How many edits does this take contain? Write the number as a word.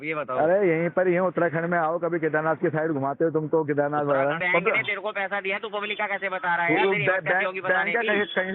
one